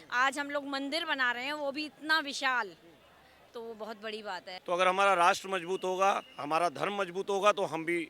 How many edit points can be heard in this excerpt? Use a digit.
1